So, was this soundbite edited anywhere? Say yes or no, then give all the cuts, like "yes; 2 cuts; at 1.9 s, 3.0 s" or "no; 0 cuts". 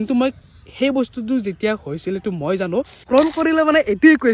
yes; 1 cut; at 3.0 s